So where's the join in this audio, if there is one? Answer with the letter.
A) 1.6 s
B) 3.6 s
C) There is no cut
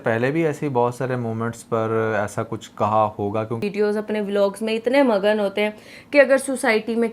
B